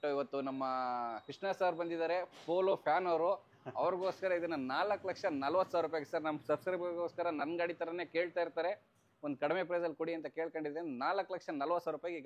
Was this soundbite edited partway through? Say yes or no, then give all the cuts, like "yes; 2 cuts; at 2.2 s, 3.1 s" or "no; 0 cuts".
no; 0 cuts